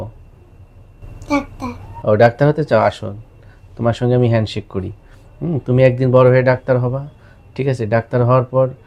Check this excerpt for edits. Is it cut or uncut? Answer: uncut